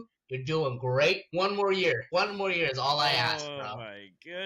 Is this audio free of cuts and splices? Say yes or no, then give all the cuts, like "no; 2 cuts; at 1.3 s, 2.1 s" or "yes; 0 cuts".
no; 2 cuts; at 1.2 s, 2.0 s